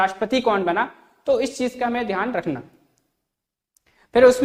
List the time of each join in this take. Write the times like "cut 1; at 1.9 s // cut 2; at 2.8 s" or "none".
none